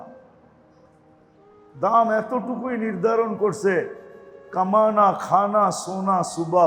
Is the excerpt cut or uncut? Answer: uncut